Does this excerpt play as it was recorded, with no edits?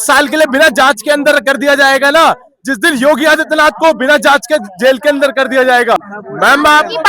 no; 1 cut; at 6.2 s

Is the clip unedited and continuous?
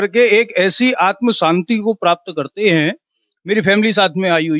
yes; 0 cuts

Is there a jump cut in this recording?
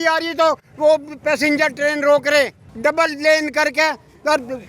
yes; 1 cut; at 2.6 s

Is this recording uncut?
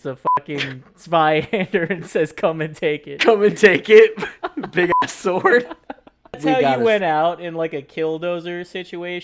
no; 1 cut; at 6.4 s

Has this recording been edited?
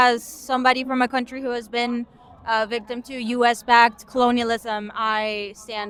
no; 0 cuts

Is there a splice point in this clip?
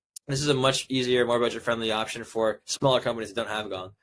no; 0 cuts

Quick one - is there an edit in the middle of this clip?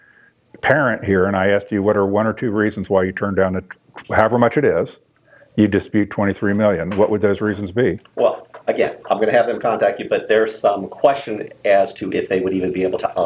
no; 0 cuts

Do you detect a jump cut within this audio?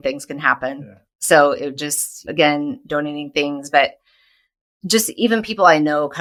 no; 0 cuts

